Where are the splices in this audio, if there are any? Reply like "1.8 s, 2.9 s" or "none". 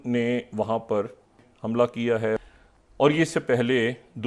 1.4 s, 2.4 s